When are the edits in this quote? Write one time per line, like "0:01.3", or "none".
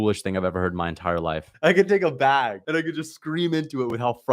0:01.5
0:02.6

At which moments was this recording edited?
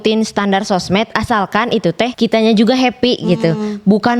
0:02.1

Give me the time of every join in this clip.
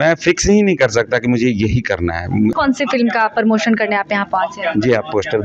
0:02.5

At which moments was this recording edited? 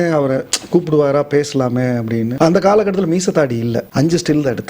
0:02.3
0:03.9

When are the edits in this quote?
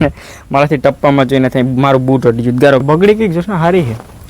0:02.8

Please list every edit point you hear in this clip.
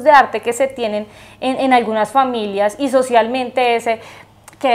none

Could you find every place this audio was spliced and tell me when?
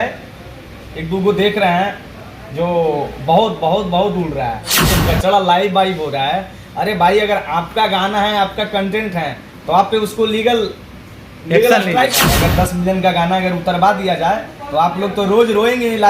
0:04.9
0:12.3

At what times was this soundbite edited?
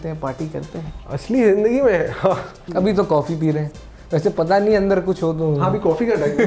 0:01.0
0:02.8

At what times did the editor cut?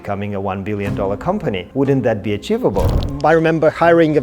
0:01.6
0:03.0

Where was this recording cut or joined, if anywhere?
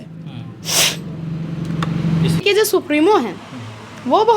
0:02.4

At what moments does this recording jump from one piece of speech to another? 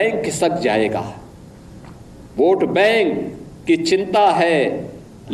none

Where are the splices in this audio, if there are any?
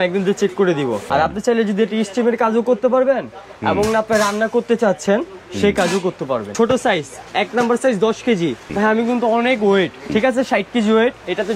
0:01.0
0:06.5
0:08.6
0:10.1

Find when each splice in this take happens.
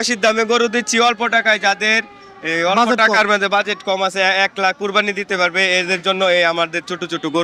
none

